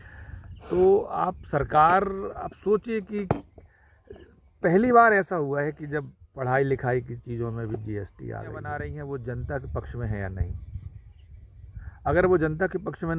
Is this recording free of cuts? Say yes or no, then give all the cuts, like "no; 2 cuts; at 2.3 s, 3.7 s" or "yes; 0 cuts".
no; 1 cut; at 8.6 s